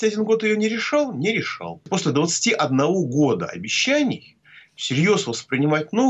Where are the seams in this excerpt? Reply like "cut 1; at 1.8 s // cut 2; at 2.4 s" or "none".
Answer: cut 1; at 1.8 s